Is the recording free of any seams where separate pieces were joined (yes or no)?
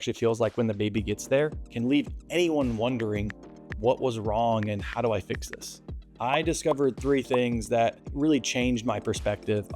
no